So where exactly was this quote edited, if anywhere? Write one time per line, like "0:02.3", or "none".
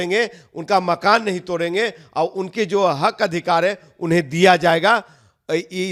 none